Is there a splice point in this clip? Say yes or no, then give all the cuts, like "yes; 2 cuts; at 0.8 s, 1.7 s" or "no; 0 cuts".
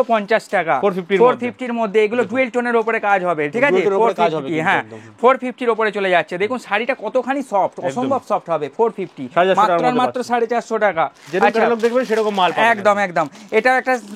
no; 0 cuts